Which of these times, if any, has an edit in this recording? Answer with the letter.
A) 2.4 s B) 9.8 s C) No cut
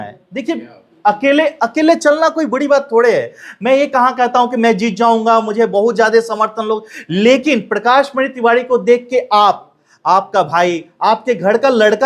C